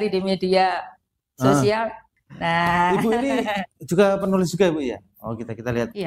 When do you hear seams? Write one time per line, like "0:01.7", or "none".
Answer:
0:02.1